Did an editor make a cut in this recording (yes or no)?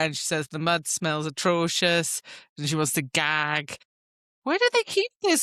yes